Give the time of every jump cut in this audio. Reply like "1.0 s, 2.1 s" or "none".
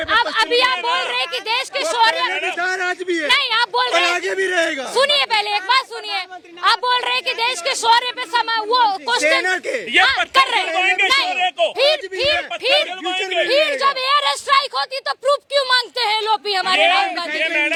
none